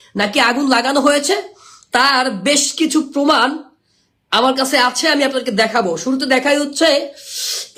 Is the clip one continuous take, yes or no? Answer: yes